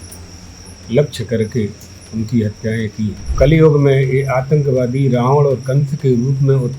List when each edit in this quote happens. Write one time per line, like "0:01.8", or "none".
0:03.2